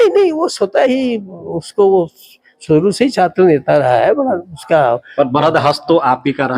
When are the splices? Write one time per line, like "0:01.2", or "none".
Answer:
none